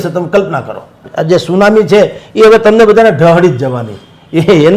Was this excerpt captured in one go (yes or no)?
no